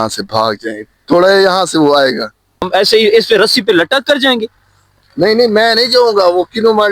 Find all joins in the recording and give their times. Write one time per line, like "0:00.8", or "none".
0:02.7